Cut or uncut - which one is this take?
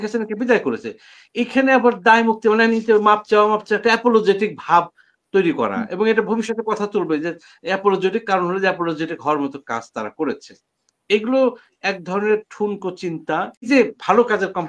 cut